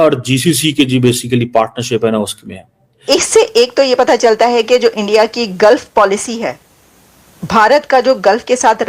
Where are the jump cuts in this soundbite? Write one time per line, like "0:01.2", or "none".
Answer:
0:03.0